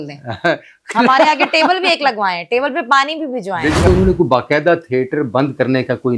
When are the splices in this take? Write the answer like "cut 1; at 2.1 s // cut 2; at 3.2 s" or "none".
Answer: cut 1; at 3.9 s